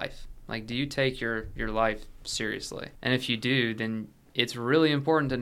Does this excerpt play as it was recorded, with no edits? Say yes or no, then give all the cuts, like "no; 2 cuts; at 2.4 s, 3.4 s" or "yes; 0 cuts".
no; 1 cut; at 2.8 s